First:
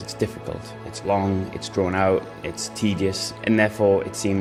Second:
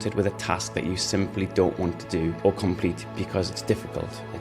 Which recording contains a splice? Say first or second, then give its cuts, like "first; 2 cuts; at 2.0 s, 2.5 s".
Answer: second; 1 cut; at 2.3 s